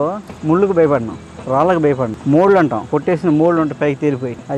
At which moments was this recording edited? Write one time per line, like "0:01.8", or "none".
0:02.9